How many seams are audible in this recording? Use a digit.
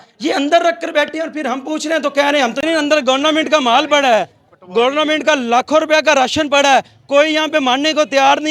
1